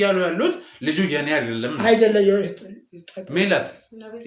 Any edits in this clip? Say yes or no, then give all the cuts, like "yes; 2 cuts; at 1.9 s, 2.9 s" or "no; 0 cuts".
no; 0 cuts